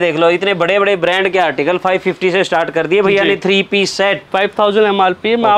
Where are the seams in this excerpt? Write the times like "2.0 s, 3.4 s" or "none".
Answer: 4.2 s